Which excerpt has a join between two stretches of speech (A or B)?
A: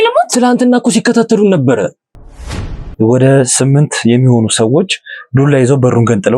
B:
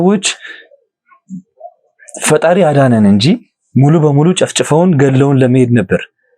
A